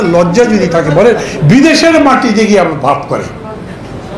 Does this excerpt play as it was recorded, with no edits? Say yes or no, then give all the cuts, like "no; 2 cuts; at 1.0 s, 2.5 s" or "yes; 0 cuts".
yes; 0 cuts